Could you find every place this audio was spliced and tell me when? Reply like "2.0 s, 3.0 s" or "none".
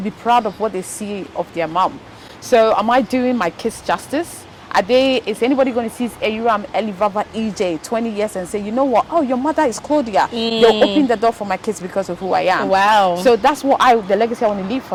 none